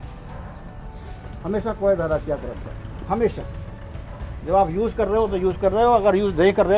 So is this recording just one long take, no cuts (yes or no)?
yes